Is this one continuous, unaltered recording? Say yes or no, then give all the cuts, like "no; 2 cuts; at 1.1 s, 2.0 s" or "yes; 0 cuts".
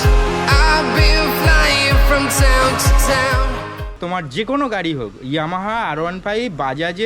no; 1 cut; at 3.9 s